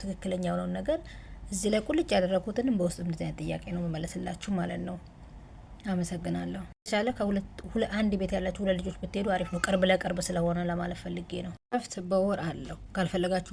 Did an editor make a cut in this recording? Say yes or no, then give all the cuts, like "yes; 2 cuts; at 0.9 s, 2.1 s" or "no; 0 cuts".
no; 0 cuts